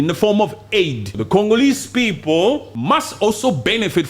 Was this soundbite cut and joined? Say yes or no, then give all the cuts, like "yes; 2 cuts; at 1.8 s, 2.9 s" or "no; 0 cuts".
yes; 2 cuts; at 1.1 s, 2.7 s